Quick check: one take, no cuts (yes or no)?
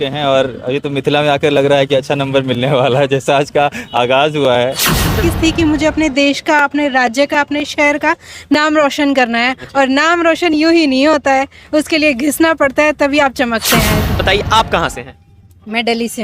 no